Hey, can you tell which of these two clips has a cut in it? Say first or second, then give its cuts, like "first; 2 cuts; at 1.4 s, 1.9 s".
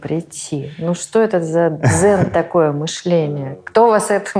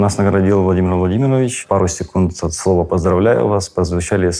second; 1 cut; at 1.6 s